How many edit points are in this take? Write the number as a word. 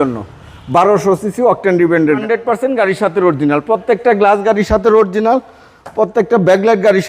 one